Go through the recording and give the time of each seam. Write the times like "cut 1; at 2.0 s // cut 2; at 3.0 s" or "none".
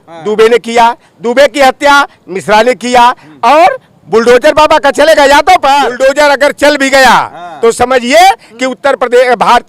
cut 1; at 5.9 s